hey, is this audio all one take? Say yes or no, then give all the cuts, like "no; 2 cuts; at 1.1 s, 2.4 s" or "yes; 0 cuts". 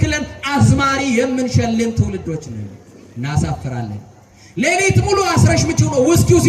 yes; 0 cuts